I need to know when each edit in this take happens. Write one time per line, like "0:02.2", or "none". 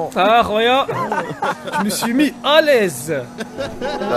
none

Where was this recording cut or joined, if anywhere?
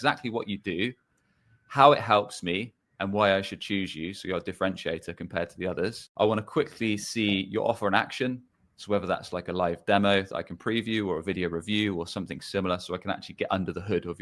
0:06.0

